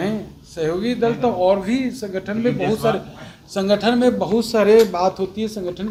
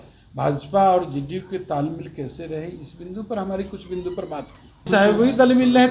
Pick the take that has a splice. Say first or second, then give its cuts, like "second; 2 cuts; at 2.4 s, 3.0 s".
second; 1 cut; at 4.9 s